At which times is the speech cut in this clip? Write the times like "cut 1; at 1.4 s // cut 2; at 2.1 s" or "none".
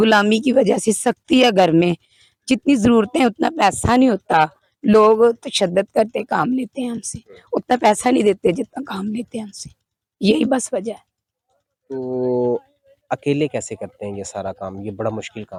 none